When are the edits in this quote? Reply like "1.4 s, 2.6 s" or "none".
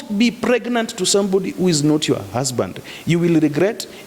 none